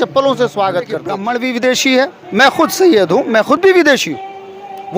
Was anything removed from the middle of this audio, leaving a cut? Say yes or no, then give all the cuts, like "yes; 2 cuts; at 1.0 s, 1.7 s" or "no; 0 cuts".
yes; 1 cut; at 1.2 s